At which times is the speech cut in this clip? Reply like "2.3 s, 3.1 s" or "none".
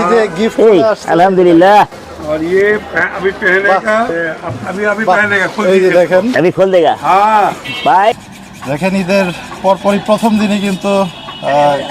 4.1 s, 8.2 s